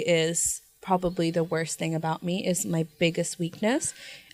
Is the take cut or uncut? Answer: uncut